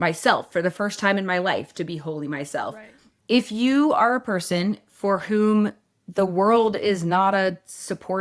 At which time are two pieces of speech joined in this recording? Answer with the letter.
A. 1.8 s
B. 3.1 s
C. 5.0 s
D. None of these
B